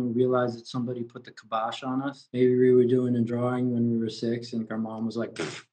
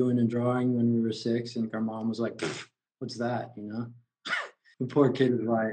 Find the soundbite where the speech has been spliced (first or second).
second